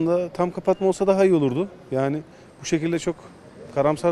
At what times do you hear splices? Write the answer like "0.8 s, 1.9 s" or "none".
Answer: none